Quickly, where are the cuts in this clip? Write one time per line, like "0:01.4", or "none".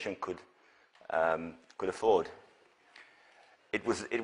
0:03.2